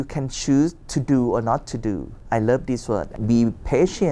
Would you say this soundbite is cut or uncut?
cut